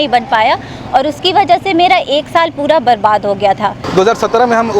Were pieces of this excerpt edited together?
yes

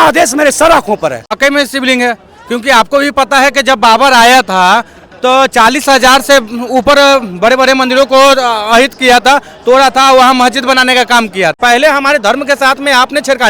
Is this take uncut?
no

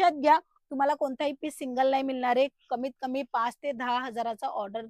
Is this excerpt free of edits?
yes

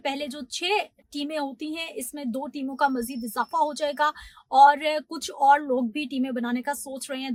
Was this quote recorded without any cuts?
yes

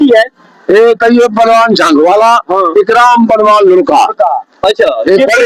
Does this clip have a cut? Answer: no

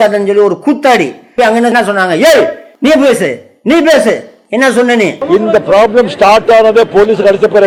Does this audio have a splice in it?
no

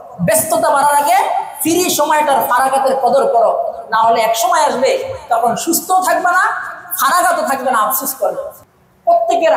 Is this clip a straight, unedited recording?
no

